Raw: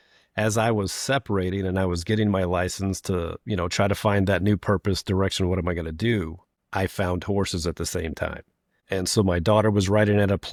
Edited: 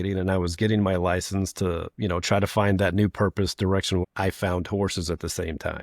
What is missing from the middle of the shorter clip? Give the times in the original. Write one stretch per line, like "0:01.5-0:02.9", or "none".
0:05.5-0:06.6